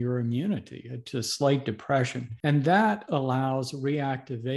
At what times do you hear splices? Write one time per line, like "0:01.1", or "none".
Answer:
0:02.2